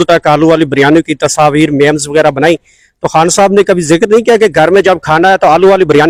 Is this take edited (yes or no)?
no